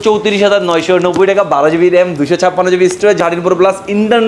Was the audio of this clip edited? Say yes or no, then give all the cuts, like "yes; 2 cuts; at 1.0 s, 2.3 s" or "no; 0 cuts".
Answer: yes; 1 cut; at 3.2 s